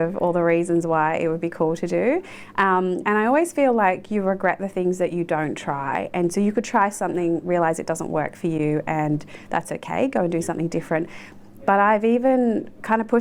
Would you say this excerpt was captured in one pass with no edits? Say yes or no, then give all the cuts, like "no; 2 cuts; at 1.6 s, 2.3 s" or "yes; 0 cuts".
yes; 0 cuts